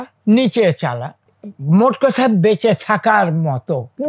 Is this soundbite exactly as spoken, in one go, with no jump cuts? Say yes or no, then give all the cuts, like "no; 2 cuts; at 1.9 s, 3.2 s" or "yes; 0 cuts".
yes; 0 cuts